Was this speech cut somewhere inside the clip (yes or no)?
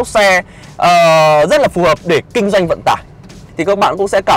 yes